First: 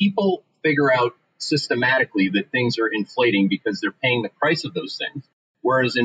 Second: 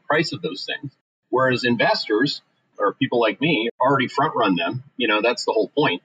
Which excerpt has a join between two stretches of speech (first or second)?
second